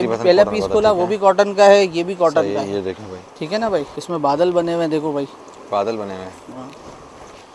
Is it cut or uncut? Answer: cut